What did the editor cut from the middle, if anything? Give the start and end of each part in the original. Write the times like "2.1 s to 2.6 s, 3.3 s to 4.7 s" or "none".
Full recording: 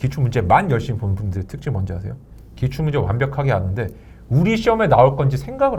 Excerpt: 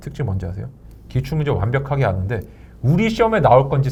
none